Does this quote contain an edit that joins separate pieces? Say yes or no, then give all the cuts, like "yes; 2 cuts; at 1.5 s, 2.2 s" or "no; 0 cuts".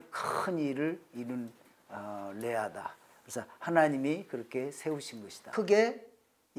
yes; 1 cut; at 5.5 s